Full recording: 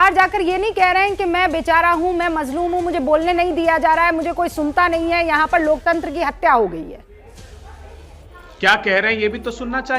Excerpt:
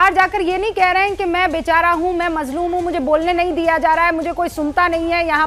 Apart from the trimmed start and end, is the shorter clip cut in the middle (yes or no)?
no